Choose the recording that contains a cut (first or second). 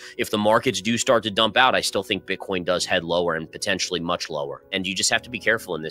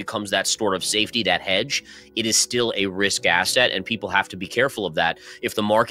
first